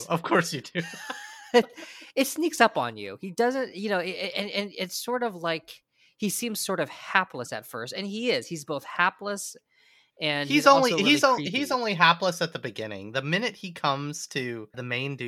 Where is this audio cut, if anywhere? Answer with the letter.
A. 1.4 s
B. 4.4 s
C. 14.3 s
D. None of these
D